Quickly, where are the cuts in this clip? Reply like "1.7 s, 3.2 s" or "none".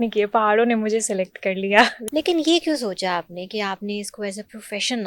2.0 s

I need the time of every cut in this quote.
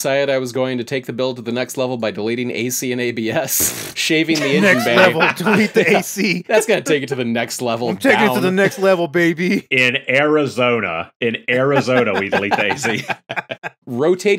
none

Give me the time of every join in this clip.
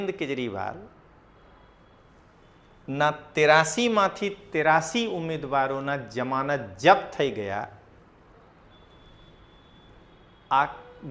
none

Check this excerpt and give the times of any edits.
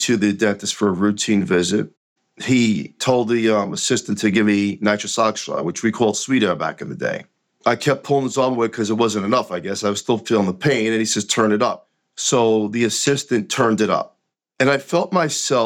2.1 s, 7.4 s

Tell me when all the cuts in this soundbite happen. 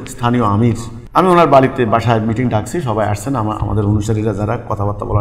0.9 s

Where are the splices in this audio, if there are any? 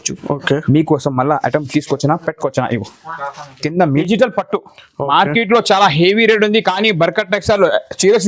3.9 s

